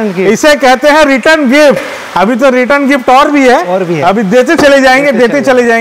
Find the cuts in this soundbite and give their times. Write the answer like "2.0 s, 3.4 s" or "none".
none